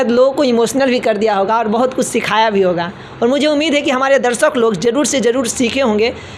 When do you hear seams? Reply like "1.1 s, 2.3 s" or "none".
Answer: none